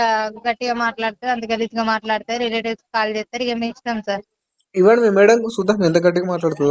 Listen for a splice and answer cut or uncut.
uncut